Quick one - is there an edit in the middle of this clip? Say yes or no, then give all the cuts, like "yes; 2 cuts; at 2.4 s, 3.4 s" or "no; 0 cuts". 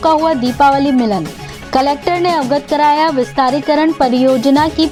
no; 0 cuts